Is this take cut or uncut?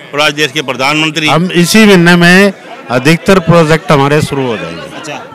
cut